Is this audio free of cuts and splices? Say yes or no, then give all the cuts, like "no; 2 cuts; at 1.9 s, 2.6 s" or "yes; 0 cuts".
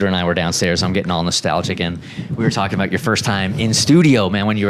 yes; 0 cuts